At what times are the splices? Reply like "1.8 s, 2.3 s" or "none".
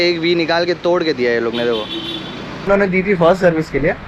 2.7 s